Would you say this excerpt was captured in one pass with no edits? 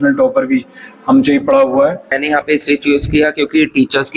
no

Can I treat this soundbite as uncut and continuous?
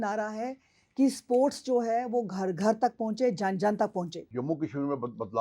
no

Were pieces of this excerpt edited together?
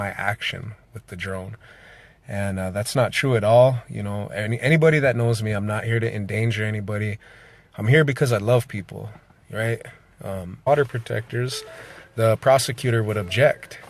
no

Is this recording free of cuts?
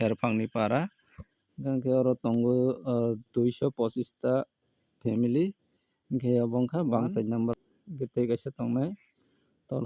no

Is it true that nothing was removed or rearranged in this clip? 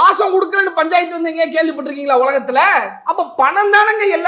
no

